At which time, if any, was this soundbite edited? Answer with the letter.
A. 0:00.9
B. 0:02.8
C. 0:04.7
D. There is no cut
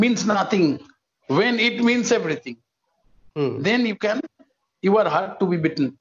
D